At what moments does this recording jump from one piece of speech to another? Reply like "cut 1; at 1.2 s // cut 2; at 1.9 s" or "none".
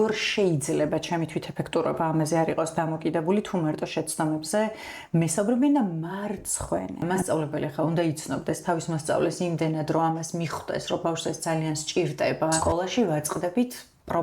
cut 1; at 7.0 s // cut 2; at 12.6 s